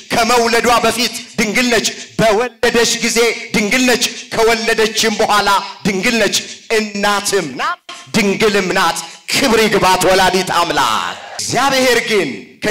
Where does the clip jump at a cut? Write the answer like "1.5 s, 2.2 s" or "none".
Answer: 11.4 s